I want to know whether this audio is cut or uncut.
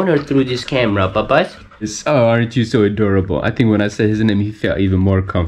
cut